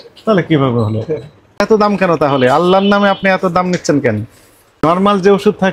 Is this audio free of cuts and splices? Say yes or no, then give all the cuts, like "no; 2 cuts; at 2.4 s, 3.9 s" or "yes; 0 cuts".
no; 2 cuts; at 1.6 s, 4.8 s